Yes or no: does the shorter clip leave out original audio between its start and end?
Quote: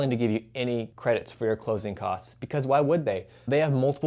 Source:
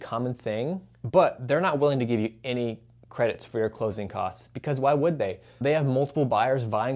yes